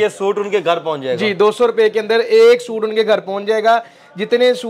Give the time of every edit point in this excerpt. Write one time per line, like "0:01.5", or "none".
none